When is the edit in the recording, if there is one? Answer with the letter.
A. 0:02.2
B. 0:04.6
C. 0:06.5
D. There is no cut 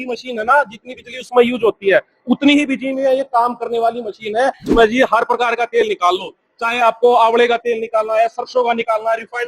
B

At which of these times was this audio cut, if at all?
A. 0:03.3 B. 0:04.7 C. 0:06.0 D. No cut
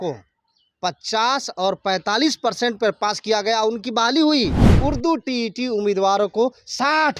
B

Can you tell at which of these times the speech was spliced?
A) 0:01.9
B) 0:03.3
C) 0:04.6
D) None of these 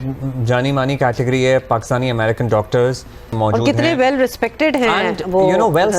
B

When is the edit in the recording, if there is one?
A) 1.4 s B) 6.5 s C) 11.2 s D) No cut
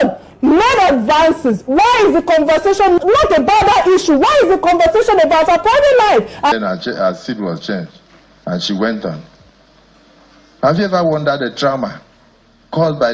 B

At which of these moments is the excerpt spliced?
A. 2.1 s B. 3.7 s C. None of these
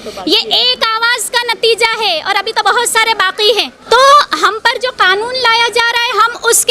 B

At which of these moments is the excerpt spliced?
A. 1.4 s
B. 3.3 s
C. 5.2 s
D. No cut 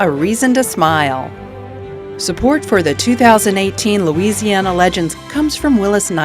C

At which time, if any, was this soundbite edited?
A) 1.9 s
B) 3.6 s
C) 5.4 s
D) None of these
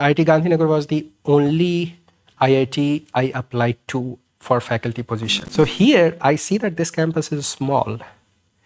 C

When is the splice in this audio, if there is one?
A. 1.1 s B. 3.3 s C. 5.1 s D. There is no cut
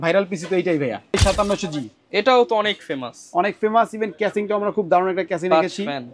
A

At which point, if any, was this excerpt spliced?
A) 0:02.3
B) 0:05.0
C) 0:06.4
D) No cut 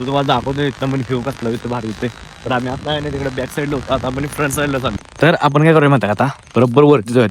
B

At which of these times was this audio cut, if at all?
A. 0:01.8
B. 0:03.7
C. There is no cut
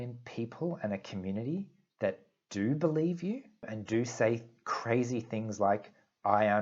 B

